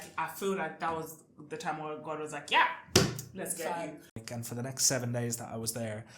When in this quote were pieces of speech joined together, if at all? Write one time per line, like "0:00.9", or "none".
0:04.2